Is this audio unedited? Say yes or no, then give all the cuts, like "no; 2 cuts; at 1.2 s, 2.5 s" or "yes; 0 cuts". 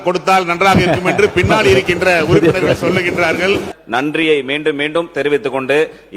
no; 1 cut; at 3.7 s